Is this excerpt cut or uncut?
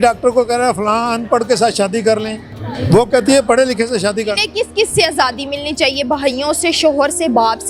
uncut